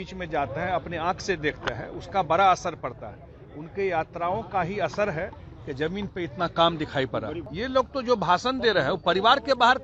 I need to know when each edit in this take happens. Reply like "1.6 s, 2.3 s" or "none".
7.4 s